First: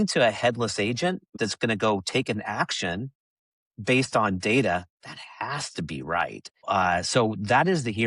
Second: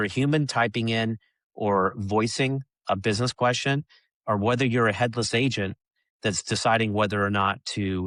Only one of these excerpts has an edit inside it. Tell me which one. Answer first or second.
first